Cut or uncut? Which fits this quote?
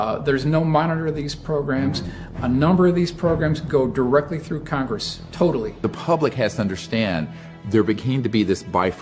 cut